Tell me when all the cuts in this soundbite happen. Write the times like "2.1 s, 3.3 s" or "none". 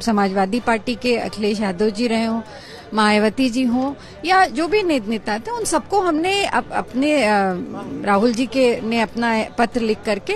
none